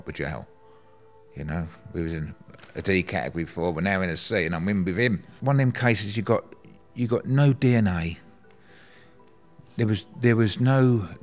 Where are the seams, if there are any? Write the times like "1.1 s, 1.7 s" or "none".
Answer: 5.3 s